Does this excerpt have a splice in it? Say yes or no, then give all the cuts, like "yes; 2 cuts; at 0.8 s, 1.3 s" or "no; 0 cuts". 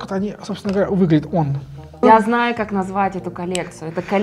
yes; 1 cut; at 2.0 s